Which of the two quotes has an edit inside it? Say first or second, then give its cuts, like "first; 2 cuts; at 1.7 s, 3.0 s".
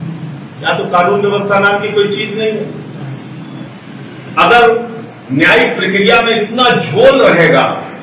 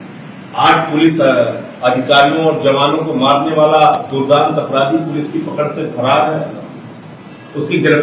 first; 1 cut; at 3.7 s